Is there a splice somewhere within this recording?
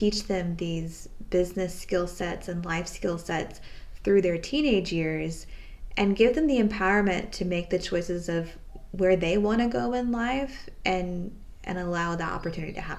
no; 0 cuts

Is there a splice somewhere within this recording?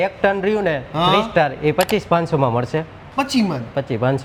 no; 0 cuts

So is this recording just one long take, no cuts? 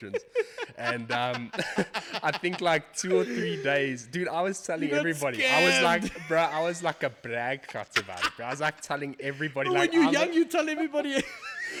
yes; 0 cuts

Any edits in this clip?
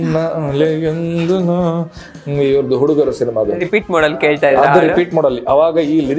no; 0 cuts

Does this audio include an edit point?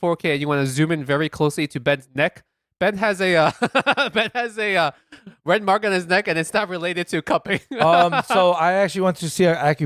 no; 0 cuts

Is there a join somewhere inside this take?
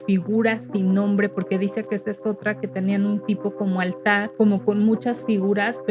yes; 1 cut; at 4.3 s

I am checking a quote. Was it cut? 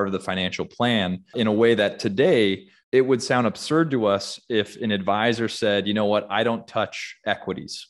yes; 2 cuts; at 1.3 s, 2.7 s

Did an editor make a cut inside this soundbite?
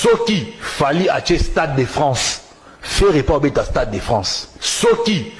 no; 0 cuts

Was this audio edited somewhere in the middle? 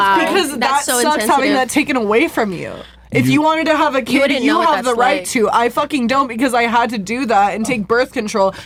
no; 0 cuts

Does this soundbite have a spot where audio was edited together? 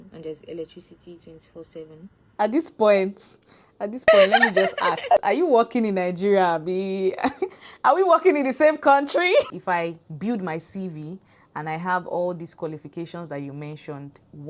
yes; 2 cuts; at 2.2 s, 9.5 s

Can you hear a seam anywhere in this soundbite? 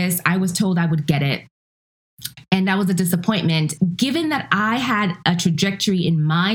yes; 1 cut; at 3.7 s

